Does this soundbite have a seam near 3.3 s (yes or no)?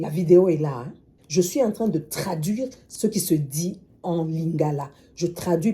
no